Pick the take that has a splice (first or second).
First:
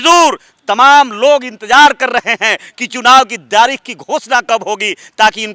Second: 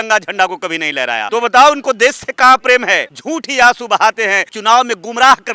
second